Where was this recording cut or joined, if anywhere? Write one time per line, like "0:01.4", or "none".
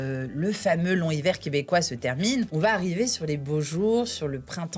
0:02.5